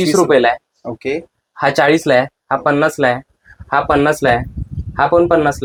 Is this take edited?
no; 0 cuts

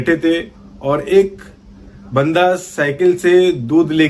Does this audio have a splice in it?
no; 0 cuts

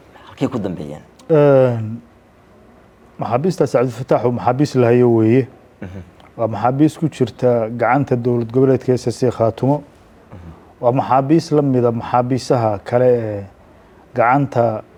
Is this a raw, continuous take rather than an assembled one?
yes; 0 cuts

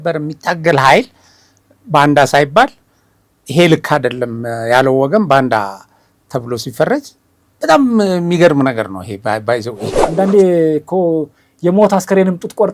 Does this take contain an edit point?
yes; 1 cut; at 9.9 s

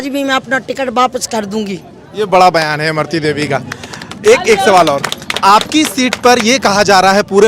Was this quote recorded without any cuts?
yes; 0 cuts

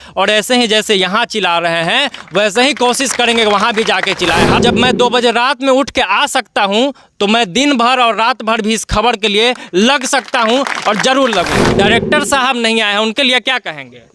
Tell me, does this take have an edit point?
yes; 2 cuts; at 4.6 s, 11.6 s

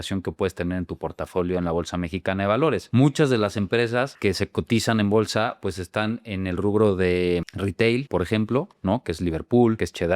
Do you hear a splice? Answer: no; 0 cuts

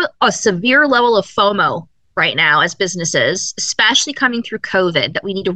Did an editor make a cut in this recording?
no; 0 cuts

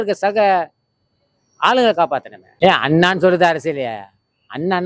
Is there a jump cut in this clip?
yes; 1 cut; at 2.4 s

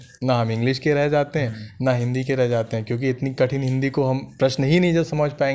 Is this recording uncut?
yes; 0 cuts

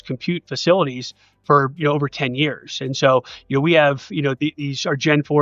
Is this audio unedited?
yes; 0 cuts

